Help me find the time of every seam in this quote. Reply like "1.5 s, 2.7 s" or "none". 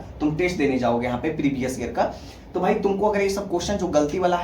none